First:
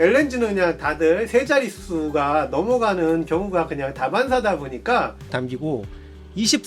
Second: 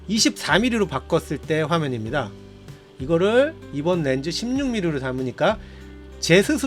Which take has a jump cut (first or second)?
first